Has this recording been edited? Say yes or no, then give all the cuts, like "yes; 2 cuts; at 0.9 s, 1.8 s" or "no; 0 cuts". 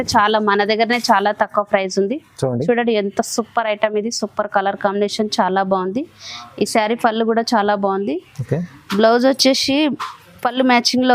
no; 0 cuts